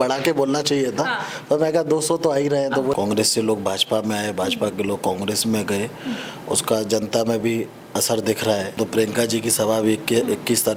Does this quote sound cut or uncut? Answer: cut